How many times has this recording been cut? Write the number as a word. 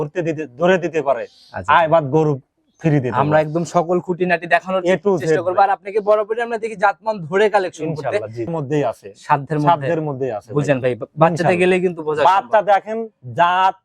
one